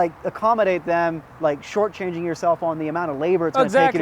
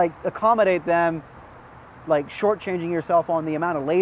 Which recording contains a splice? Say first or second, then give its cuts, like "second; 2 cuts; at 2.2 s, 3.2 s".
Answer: first; 1 cut; at 1.3 s